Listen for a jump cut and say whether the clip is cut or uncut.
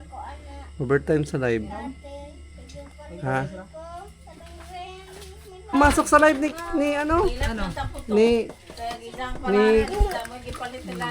cut